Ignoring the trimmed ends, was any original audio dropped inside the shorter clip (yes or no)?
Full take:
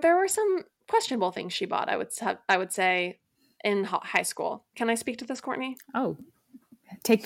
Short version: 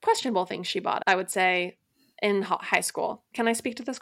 yes